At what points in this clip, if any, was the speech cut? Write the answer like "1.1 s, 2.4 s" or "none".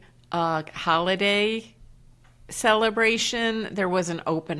none

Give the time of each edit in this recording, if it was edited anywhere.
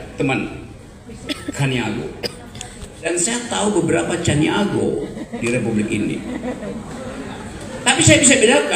1.1 s, 3.0 s

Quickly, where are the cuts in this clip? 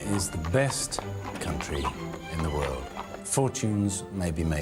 none

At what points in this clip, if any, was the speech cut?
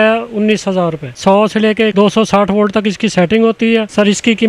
1.2 s

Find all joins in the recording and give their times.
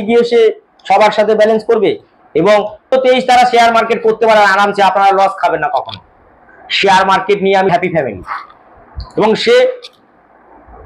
2.9 s, 7.7 s

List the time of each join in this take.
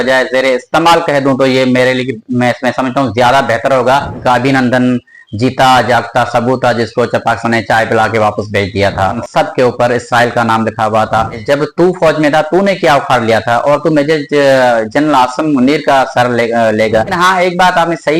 4.2 s, 9.2 s, 11.4 s, 17.1 s

